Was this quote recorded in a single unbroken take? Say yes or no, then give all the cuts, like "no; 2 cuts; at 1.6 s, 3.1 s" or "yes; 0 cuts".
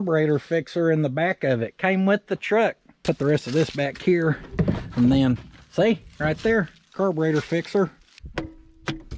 no; 1 cut; at 8.1 s